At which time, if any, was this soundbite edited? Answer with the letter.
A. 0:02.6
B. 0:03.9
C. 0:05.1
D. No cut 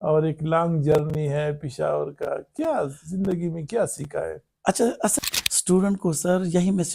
C